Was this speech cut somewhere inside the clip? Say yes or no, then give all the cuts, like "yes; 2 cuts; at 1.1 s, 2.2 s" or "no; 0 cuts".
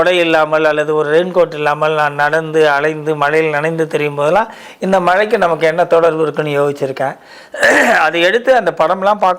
no; 0 cuts